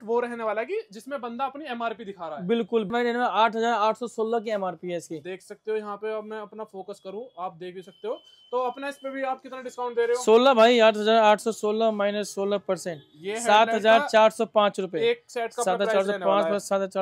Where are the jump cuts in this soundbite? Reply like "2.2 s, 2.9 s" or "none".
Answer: 2.9 s